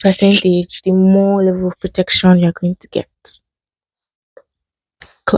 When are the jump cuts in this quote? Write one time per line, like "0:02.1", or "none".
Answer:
none